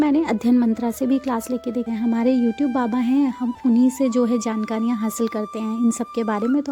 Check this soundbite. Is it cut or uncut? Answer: cut